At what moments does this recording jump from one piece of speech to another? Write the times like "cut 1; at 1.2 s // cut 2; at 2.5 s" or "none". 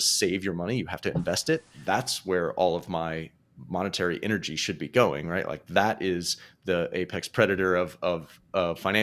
cut 1; at 1.7 s